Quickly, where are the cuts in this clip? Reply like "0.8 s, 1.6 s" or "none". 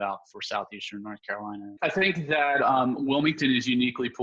1.7 s